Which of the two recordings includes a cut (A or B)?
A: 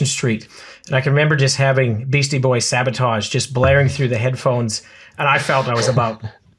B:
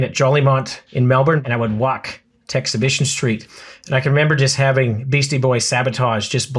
B